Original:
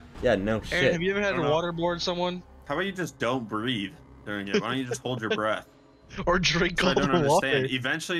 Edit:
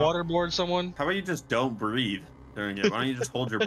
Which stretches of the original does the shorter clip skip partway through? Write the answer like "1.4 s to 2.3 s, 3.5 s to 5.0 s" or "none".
2.4 s to 2.6 s

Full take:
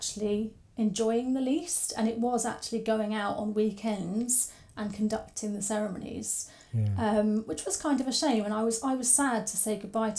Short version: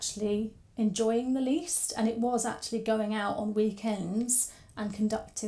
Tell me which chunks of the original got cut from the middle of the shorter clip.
none

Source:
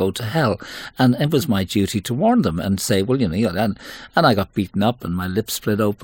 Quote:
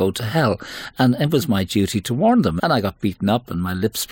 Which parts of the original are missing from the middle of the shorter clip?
2.6 s to 4.1 s

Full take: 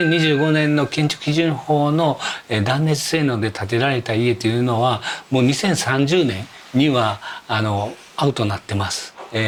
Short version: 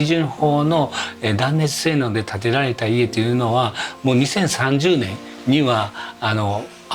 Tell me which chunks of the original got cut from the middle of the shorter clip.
none

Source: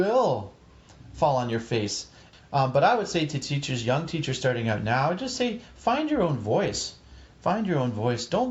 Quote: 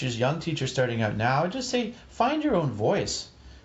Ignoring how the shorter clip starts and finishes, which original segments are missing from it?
none

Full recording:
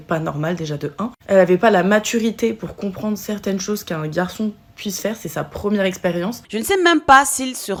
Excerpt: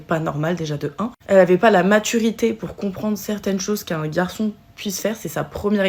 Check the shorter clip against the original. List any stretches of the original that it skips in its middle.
none

